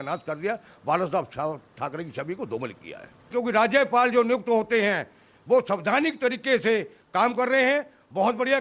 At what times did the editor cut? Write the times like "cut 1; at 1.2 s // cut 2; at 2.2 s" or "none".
cut 1; at 3.3 s